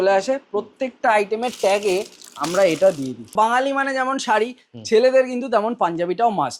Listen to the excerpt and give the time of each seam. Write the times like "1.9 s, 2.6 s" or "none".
3.3 s